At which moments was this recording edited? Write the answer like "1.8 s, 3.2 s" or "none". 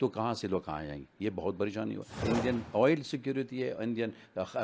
2.2 s